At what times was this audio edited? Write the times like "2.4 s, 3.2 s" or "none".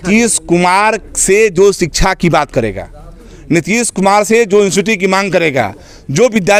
none